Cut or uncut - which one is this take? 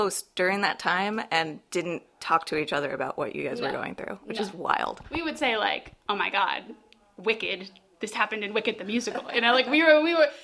uncut